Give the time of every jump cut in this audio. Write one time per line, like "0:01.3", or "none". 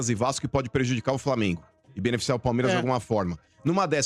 none

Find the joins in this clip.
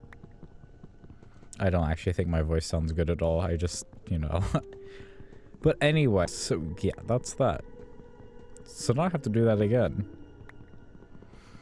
0:06.3

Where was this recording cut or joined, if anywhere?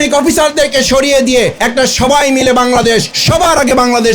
0:01.6
0:03.1

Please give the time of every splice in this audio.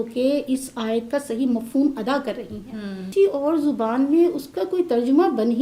0:03.1

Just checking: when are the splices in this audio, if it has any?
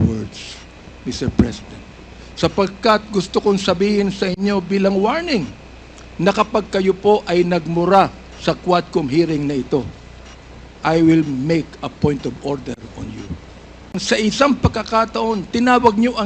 0:14.0

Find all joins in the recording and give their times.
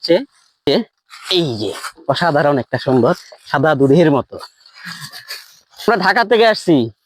0:00.7
0:05.9

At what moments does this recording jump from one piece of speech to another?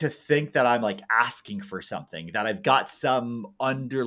none

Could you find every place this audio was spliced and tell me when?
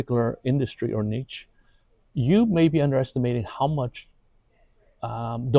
none

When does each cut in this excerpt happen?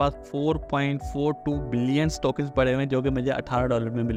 none

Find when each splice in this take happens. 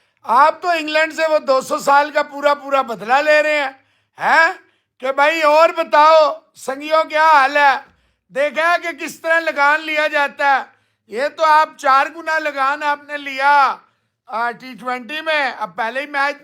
none

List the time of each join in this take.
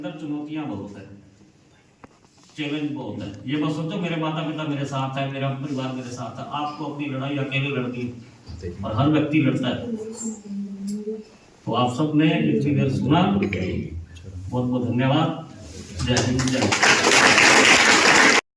none

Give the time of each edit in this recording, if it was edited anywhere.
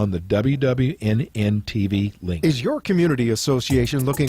0:02.4

